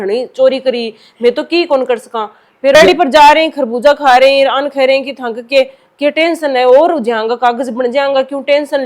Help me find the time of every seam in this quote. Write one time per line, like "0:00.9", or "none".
0:02.8